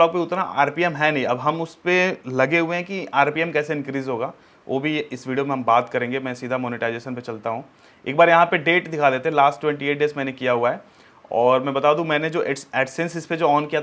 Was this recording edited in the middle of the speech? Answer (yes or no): no